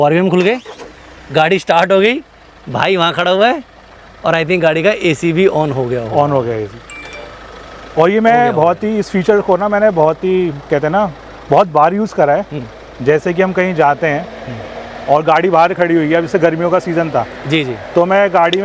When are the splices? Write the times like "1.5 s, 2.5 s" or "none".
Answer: none